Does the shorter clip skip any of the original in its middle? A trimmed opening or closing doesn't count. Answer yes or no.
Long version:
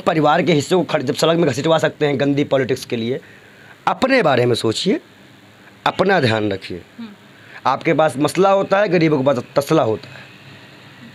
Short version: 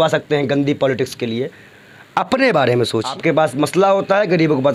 yes